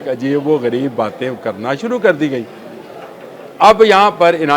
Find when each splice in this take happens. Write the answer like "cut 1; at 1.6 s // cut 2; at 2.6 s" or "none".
none